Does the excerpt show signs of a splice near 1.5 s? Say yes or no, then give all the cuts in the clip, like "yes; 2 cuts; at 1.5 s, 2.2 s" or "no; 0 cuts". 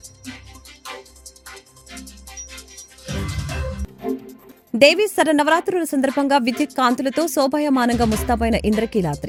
no; 0 cuts